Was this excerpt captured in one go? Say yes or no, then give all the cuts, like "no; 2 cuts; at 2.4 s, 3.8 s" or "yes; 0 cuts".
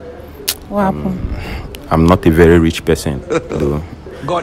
yes; 0 cuts